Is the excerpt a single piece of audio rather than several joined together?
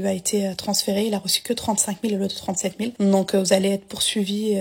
no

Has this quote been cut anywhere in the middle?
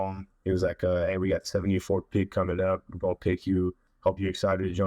yes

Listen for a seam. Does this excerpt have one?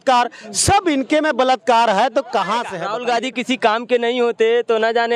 yes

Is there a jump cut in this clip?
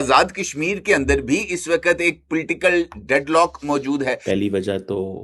yes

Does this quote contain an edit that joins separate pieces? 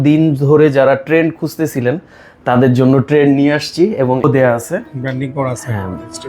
yes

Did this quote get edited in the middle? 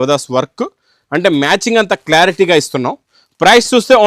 no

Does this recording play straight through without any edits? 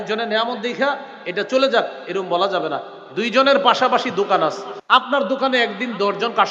no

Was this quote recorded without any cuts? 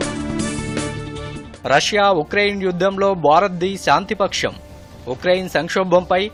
yes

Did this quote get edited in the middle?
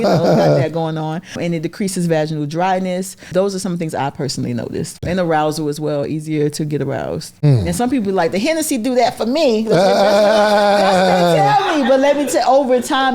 yes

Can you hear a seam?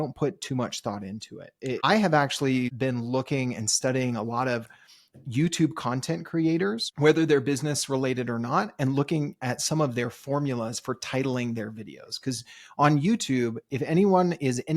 yes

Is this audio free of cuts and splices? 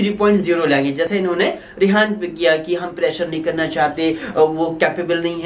yes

